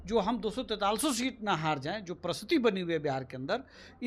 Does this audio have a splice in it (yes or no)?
no